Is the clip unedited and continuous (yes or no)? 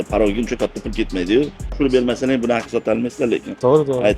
no